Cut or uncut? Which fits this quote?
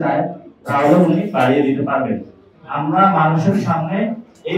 cut